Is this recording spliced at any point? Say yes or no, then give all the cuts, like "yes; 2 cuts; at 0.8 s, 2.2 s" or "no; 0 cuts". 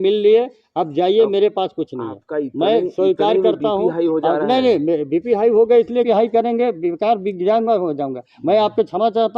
yes; 1 cut; at 6.1 s